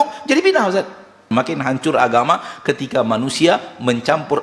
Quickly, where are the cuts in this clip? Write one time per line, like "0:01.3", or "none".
0:01.3